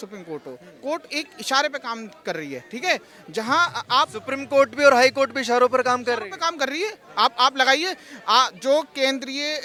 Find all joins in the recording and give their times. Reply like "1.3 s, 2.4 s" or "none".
none